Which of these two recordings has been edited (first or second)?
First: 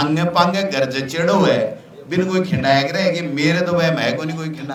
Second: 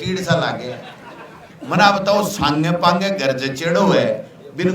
second